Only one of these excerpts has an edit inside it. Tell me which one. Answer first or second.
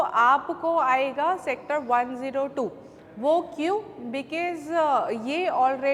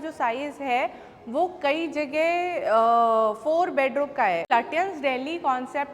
second